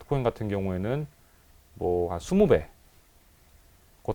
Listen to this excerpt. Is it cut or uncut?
uncut